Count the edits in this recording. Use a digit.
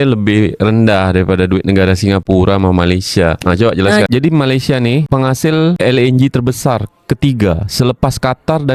1